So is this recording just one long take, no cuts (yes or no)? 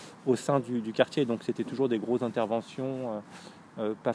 yes